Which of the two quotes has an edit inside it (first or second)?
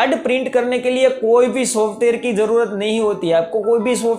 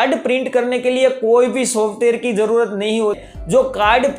second